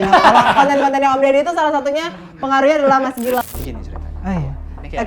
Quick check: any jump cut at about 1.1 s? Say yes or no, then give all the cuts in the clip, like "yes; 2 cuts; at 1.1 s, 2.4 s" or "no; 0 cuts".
no; 1 cut; at 3.4 s